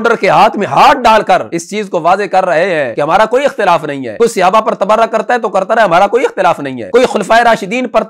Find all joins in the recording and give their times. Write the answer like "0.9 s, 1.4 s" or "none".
1.6 s, 2.9 s, 4.0 s, 6.7 s